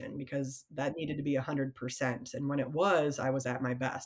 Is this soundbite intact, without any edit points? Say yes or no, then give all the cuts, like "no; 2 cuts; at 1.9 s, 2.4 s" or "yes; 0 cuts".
yes; 0 cuts